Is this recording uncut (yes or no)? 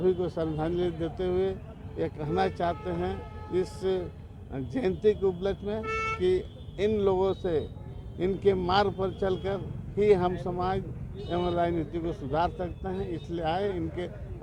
yes